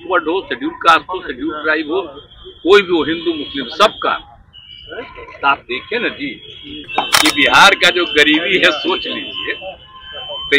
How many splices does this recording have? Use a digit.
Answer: 1